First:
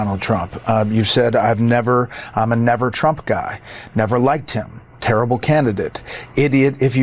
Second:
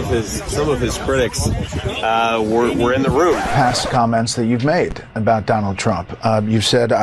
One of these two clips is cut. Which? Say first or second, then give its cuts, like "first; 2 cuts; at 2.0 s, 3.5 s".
second; 1 cut; at 3.5 s